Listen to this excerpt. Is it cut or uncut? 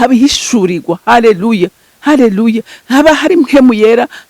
uncut